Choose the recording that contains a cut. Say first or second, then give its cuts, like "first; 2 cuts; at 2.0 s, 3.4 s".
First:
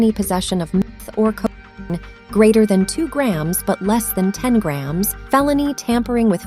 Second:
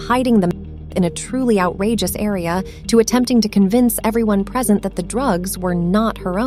first; 2 cuts; at 0.8 s, 5.2 s